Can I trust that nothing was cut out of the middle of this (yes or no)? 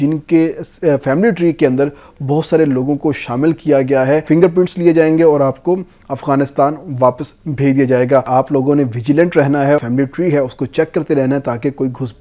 no